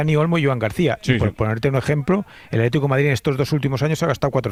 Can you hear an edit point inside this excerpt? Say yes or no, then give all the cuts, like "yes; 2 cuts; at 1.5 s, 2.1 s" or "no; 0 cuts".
no; 0 cuts